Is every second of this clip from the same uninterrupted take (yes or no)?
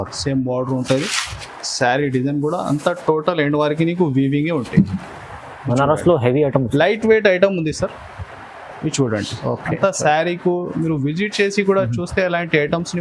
yes